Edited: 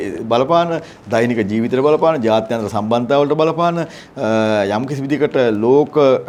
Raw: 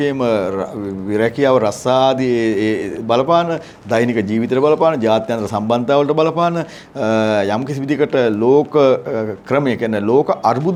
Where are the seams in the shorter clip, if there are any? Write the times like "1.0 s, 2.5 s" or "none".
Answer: none